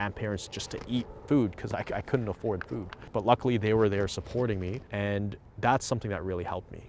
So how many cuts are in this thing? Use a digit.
1